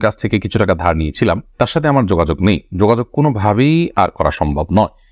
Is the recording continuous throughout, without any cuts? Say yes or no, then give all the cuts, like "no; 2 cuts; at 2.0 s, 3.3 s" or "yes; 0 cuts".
yes; 0 cuts